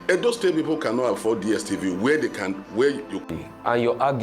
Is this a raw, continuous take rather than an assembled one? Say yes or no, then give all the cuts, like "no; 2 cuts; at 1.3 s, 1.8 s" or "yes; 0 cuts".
no; 1 cut; at 3.3 s